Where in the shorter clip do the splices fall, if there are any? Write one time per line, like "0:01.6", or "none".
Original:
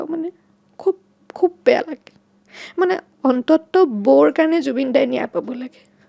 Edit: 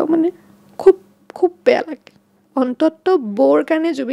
0:02.4